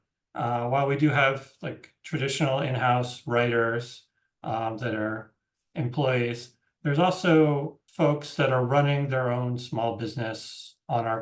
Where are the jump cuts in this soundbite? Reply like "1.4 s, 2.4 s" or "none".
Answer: 7.8 s